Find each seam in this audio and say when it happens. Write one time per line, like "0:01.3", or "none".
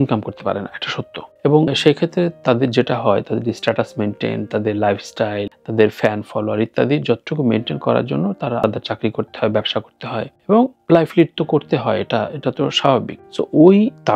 0:01.7
0:13.2